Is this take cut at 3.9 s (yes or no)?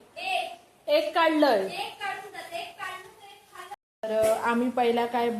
yes